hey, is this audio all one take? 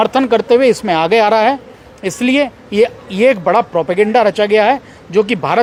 yes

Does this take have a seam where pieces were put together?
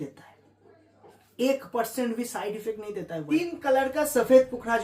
yes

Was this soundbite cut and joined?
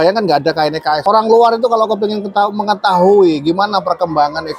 yes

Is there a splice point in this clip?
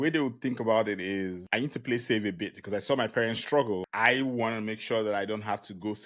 yes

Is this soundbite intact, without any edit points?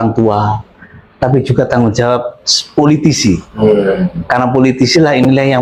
yes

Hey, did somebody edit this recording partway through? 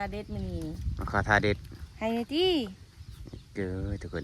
no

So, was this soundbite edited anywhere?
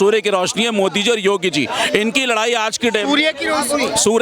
no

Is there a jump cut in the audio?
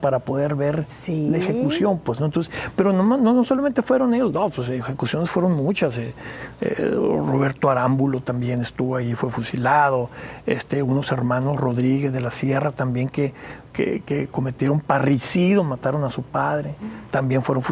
no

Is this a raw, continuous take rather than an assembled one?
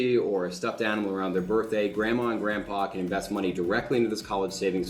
yes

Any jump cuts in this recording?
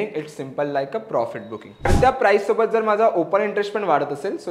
yes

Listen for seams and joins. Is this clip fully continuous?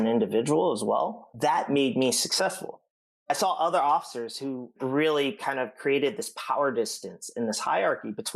no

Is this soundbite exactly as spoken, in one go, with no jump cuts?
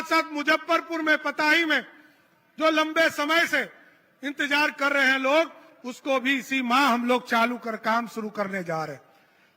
yes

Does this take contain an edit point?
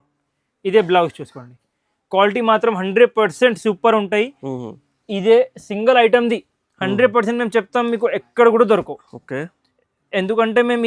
no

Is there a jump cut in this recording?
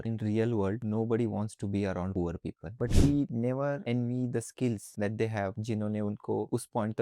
yes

